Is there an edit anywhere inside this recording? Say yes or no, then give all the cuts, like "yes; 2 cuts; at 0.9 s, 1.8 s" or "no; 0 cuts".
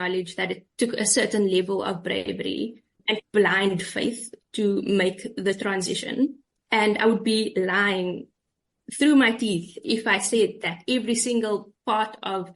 yes; 1 cut; at 6.5 s